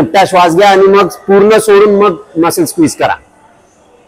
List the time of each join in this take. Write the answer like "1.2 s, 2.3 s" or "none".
none